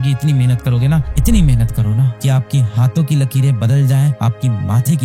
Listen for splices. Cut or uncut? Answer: uncut